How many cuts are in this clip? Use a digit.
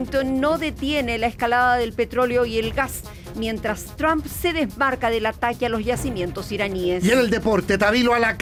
0